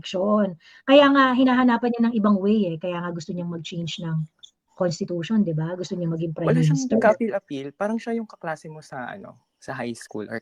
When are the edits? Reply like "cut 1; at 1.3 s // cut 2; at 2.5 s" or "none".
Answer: none